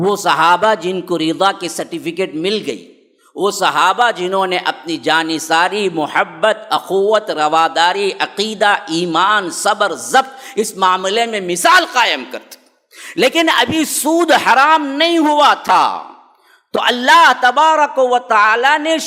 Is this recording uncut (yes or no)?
yes